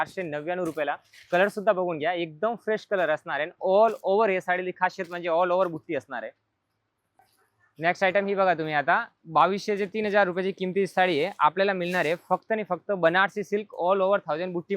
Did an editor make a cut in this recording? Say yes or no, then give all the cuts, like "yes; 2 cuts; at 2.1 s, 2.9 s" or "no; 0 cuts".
no; 0 cuts